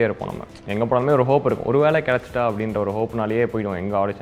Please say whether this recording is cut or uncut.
uncut